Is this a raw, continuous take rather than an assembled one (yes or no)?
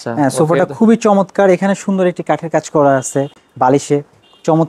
yes